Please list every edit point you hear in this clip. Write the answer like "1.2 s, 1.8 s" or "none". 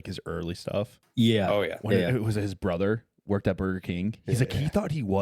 1.0 s